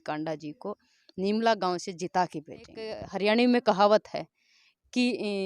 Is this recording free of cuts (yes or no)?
no